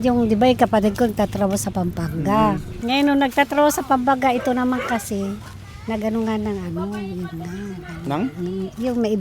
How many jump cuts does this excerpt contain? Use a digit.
1